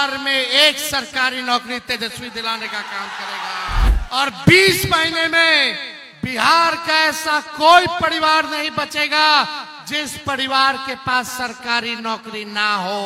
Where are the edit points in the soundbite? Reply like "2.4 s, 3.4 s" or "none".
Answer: 3.9 s

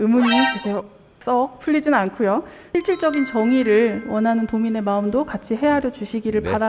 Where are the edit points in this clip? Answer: 2.6 s

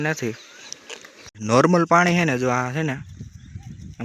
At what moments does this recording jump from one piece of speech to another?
1.2 s

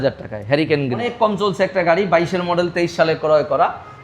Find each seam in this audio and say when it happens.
1.0 s

